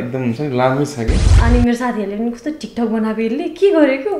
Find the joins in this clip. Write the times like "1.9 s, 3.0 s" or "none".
1.3 s